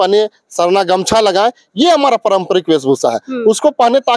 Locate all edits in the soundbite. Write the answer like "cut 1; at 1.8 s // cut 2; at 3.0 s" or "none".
none